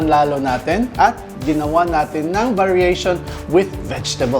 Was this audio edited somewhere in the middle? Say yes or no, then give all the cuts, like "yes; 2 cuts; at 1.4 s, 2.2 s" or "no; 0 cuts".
no; 0 cuts